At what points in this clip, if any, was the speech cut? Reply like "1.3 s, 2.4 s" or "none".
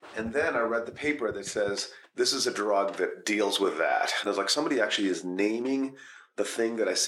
2.0 s, 4.3 s